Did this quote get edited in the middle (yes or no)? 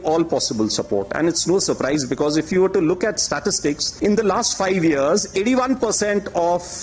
no